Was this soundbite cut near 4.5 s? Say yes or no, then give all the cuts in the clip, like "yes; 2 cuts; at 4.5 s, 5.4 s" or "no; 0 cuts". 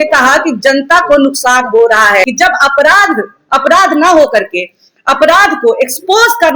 no; 1 cut; at 2.3 s